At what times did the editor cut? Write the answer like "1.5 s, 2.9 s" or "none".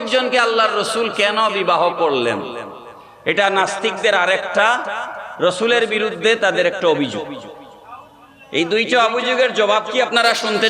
none